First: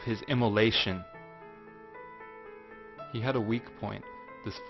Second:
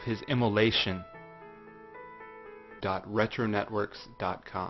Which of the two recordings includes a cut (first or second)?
first